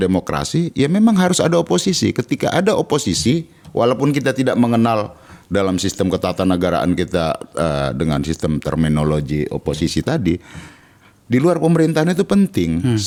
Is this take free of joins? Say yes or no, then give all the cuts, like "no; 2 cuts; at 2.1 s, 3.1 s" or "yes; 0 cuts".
yes; 0 cuts